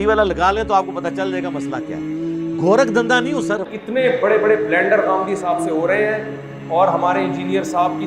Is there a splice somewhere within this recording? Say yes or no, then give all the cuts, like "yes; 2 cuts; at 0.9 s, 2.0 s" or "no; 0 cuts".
yes; 3 cuts; at 1.1 s, 2.6 s, 3.6 s